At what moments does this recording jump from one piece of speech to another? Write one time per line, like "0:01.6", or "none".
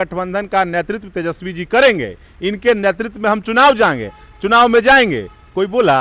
none